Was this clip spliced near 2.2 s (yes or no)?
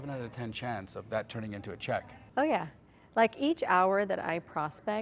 yes